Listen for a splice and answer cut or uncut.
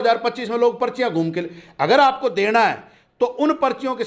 uncut